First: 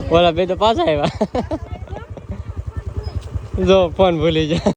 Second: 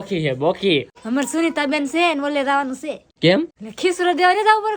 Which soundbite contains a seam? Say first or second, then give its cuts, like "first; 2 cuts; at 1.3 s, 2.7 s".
second; 3 cuts; at 1.0 s, 3.1 s, 3.6 s